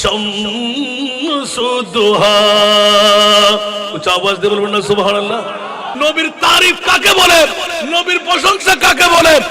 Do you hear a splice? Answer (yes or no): yes